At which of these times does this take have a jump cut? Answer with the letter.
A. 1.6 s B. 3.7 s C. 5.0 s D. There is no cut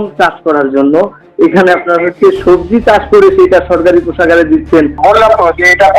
C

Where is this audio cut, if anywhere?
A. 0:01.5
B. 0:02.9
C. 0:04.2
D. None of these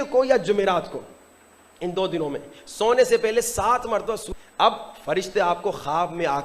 C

